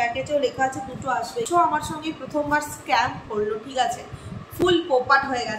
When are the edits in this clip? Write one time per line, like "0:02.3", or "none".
0:01.5